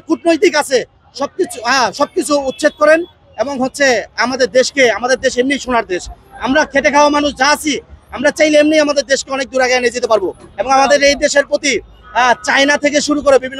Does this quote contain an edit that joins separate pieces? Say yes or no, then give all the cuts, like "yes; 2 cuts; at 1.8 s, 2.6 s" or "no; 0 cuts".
no; 0 cuts